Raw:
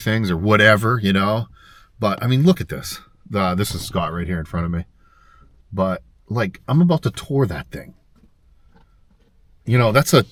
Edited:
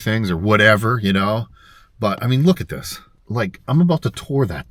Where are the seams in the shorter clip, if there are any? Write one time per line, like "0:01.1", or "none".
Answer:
0:03.1